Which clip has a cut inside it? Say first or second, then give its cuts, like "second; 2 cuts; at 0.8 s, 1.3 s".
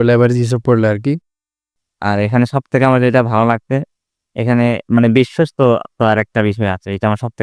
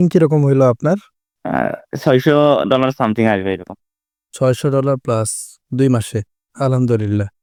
first; 1 cut; at 1.7 s